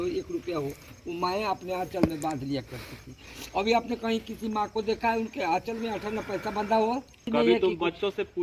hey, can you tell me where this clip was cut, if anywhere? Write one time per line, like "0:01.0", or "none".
0:07.2